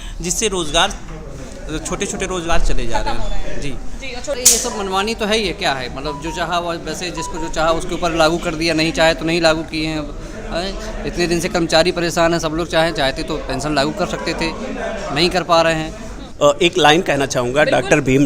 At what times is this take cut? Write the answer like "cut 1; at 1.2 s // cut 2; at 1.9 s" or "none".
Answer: cut 1; at 4.4 s // cut 2; at 16.2 s

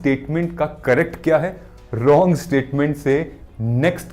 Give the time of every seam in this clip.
none

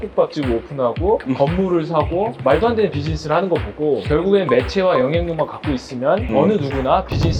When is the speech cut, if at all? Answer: cut 1; at 1.2 s // cut 2; at 2.3 s // cut 3; at 4.0 s // cut 4; at 6.3 s

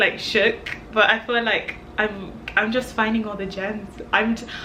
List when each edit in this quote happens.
none

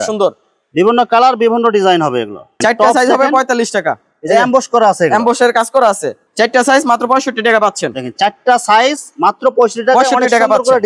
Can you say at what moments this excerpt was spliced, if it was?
cut 1; at 2.5 s // cut 2; at 6.2 s

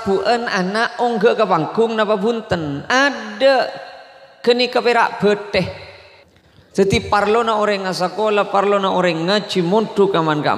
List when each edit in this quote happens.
cut 1; at 6.3 s

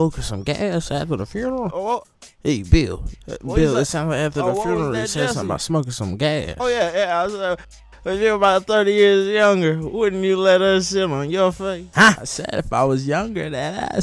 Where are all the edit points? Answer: none

